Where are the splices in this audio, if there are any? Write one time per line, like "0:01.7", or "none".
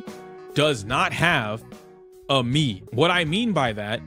0:02.8